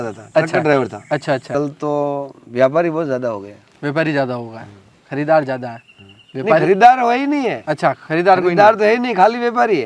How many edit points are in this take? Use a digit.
1